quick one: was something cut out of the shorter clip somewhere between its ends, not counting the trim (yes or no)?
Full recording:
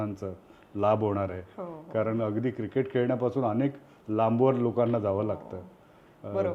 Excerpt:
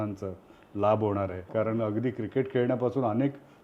yes